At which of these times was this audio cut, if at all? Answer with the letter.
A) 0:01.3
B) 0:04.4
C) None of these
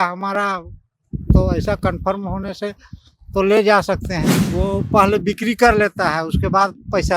B